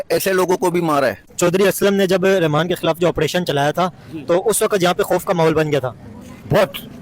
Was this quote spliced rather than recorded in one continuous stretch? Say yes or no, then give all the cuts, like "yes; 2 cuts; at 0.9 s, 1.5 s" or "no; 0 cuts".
yes; 1 cut; at 1.3 s